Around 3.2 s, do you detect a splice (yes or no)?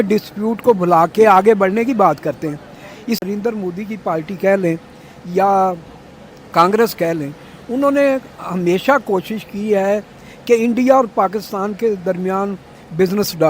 yes